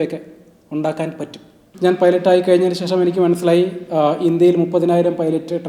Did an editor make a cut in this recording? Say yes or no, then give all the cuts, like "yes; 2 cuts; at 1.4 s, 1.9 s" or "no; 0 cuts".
yes; 1 cut; at 1.6 s